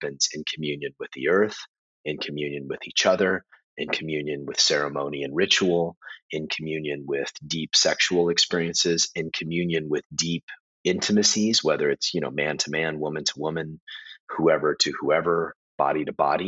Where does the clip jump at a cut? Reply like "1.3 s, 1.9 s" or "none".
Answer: none